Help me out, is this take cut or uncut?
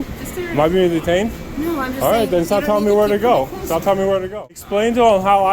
cut